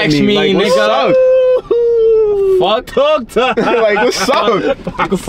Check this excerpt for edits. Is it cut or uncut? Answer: uncut